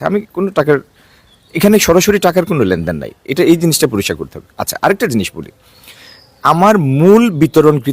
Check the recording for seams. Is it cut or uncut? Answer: uncut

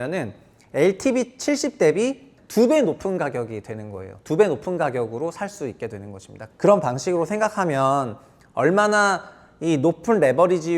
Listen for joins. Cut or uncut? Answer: cut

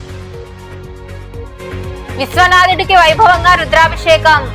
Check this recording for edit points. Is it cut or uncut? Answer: uncut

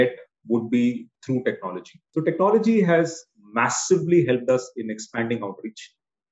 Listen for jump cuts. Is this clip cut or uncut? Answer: cut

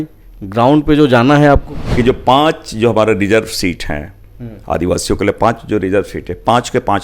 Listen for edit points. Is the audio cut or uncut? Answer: cut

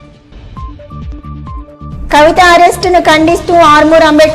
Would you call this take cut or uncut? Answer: cut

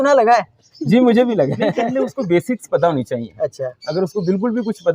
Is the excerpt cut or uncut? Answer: cut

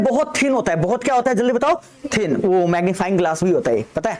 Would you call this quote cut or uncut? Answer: uncut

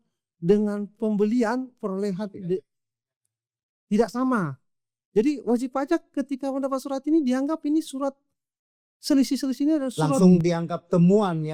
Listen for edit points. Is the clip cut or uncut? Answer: uncut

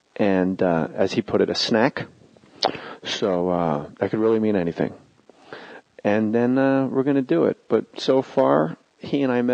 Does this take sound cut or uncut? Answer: uncut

